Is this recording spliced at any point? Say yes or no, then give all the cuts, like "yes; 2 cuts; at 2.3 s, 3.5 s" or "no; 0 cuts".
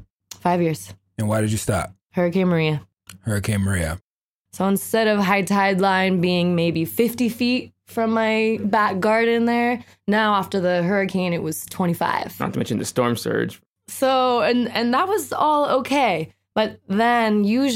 yes; 1 cut; at 4.0 s